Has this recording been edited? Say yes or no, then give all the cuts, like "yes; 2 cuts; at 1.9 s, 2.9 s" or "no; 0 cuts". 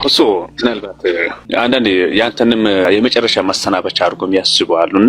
yes; 2 cuts; at 1.5 s, 2.8 s